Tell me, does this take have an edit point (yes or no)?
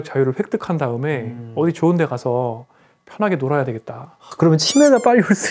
no